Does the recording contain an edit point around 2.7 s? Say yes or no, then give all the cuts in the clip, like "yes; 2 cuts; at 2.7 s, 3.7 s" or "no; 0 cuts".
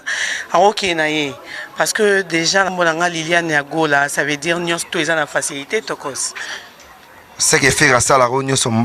yes; 1 cut; at 2.7 s